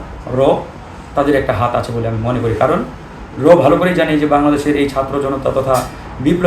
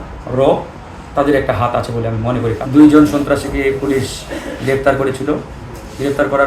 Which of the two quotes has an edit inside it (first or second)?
second